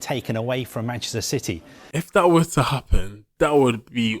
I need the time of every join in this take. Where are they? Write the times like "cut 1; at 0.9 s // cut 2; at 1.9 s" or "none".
cut 1; at 1.7 s